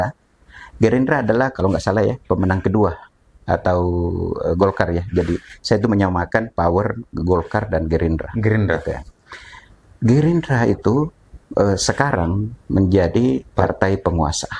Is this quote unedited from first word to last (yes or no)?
yes